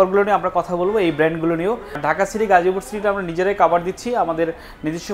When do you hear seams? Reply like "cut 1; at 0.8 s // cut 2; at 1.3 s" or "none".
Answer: cut 1; at 2.0 s